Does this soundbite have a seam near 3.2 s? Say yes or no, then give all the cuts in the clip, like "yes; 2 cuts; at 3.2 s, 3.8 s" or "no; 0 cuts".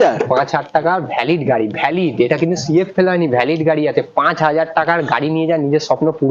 no; 0 cuts